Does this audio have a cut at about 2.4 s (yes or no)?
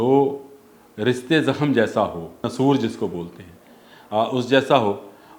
yes